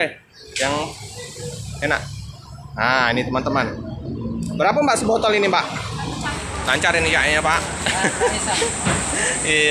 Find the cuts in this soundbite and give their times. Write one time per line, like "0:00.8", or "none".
0:06.3

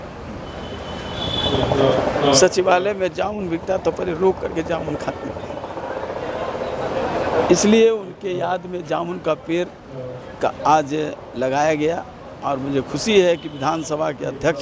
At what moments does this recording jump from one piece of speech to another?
none

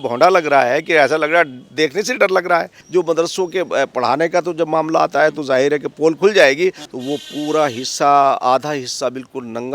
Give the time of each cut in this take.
0:02.7
0:06.9

